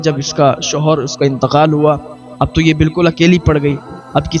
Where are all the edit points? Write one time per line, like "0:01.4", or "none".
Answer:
none